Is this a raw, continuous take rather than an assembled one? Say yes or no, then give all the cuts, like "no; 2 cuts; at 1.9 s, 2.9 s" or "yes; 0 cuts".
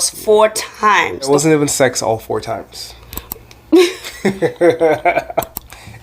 no; 1 cut; at 1.3 s